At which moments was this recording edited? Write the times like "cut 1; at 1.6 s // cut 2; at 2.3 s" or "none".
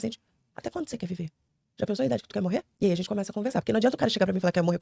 cut 1; at 2.7 s